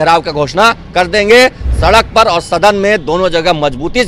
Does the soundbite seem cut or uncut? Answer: uncut